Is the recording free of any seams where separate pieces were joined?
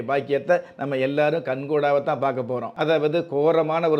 no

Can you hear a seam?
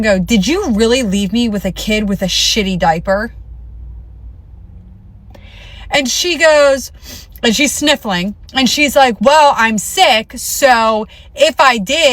no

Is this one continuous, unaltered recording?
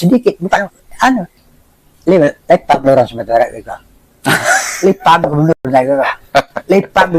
no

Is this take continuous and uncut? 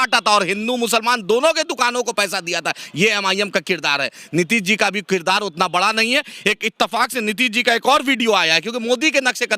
yes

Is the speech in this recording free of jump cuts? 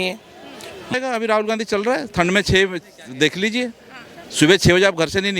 no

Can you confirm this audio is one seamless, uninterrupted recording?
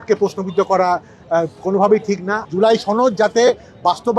no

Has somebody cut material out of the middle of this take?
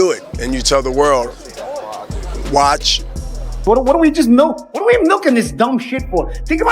yes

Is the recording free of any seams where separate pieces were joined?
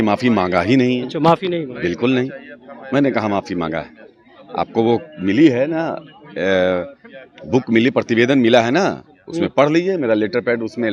yes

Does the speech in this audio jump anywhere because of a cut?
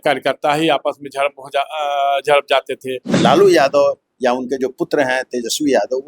yes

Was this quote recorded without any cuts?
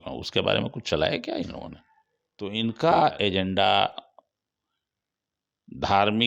no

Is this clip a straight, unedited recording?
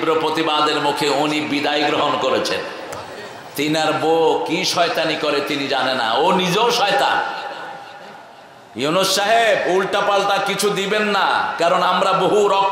yes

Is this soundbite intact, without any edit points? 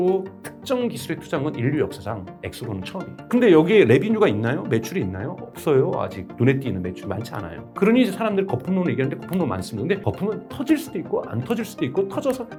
yes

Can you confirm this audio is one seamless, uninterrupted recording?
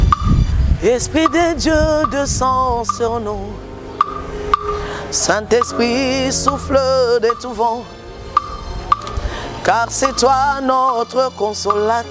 yes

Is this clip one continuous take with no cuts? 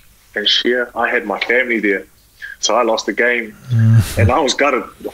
no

